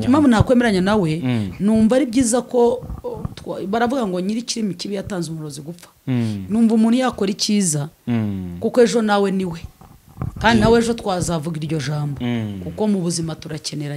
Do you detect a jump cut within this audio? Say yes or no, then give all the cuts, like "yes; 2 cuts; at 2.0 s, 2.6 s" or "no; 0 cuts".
no; 0 cuts